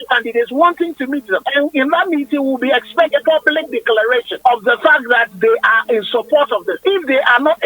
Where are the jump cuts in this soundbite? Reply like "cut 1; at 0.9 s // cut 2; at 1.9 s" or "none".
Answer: cut 1; at 1.4 s // cut 2; at 3.2 s // cut 3; at 4.3 s // cut 4; at 6.7 s